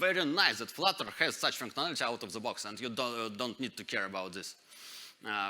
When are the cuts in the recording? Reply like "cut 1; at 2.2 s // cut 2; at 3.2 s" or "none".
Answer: none